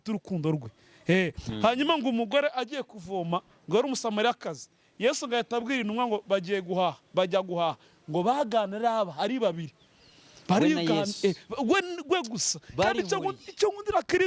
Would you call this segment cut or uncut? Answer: uncut